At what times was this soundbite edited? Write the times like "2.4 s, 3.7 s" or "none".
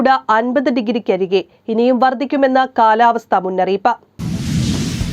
4.1 s